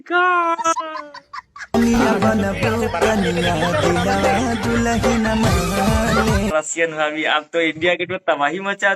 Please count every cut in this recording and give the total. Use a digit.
1